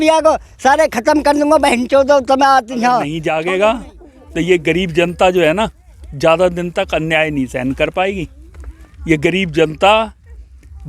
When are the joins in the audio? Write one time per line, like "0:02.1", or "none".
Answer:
0:03.1